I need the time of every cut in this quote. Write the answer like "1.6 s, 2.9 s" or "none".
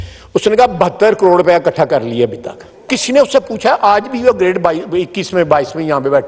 2.9 s